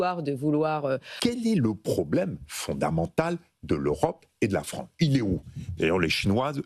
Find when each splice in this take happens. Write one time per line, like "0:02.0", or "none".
0:01.1